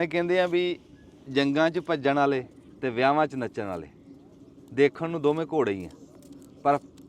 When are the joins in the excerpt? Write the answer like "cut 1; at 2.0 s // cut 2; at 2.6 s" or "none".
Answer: cut 1; at 2.6 s